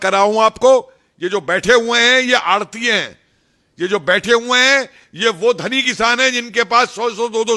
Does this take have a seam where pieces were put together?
no; 0 cuts

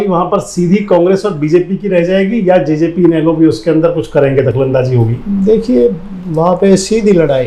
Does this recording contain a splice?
no; 0 cuts

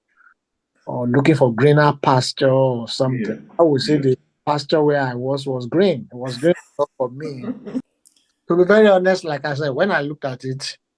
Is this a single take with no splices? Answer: no; 1 cut; at 7.9 s

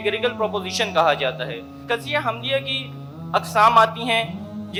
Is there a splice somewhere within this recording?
no; 0 cuts

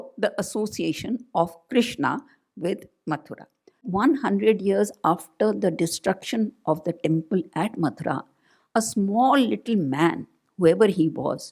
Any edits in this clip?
yes; 1 cut; at 3.9 s

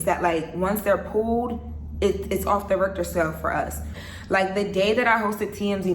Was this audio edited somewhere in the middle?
yes; 1 cut; at 4.0 s

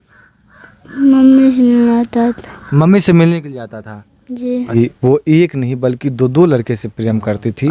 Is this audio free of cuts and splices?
no; 1 cut; at 4.7 s

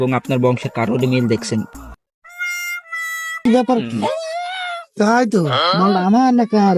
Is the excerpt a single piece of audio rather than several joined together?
no; 1 cut; at 3.3 s

